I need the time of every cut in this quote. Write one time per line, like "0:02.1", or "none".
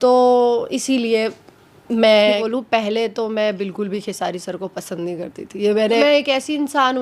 0:02.4
0:06.0